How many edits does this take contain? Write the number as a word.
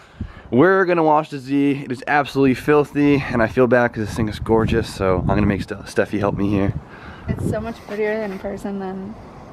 one